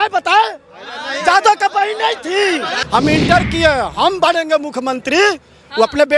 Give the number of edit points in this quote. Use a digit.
1